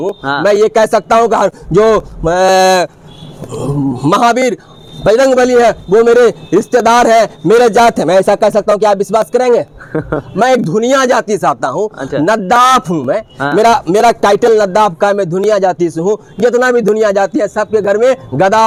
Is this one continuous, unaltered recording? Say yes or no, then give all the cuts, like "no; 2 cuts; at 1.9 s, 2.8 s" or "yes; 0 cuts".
yes; 0 cuts